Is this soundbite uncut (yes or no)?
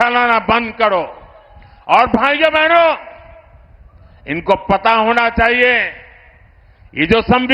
yes